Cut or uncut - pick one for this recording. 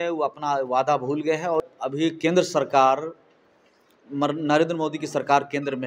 cut